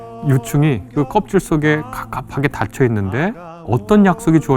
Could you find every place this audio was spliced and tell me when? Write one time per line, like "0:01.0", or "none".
0:03.5